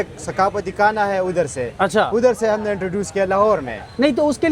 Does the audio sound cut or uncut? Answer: uncut